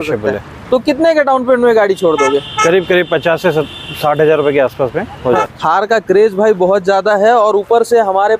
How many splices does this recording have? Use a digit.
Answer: 1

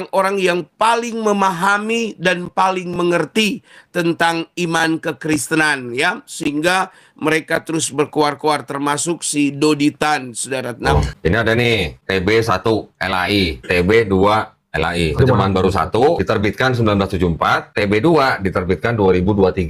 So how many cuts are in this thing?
1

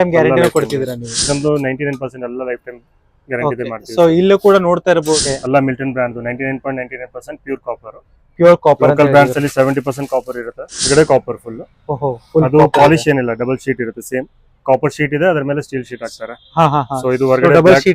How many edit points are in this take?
3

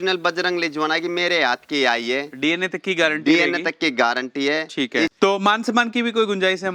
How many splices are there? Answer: 1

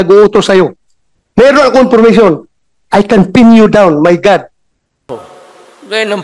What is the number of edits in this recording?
1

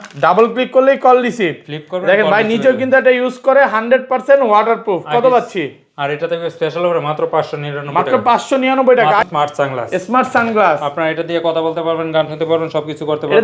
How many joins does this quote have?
1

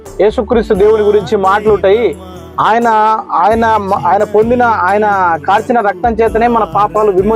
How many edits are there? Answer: 0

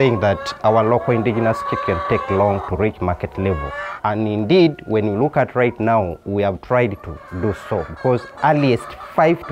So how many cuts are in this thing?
1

